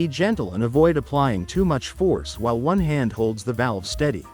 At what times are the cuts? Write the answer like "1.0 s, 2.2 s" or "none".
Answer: none